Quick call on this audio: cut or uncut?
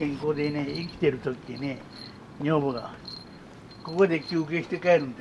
uncut